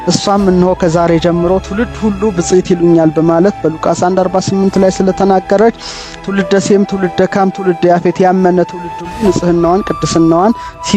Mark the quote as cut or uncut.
uncut